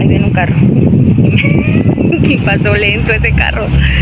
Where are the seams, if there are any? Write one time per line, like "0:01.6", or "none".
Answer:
none

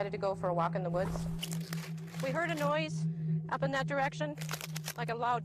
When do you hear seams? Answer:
0:01.2

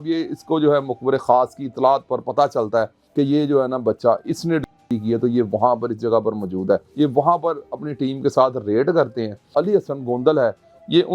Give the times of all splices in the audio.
0:03.0
0:06.9
0:09.4

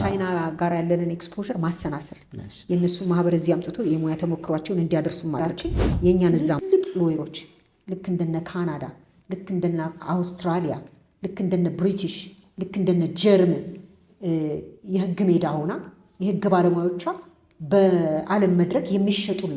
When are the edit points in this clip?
0:06.5

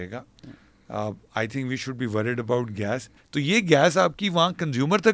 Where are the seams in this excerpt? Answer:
0:03.2

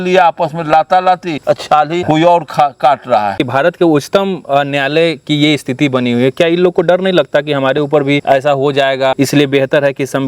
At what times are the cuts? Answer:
0:01.8
0:03.4
0:08.2
0:09.1

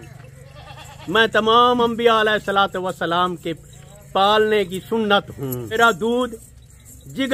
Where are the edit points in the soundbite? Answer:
0:05.7

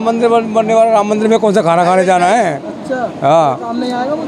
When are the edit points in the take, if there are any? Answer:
none

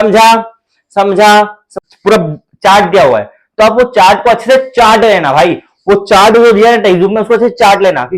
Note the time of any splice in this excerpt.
0:01.6

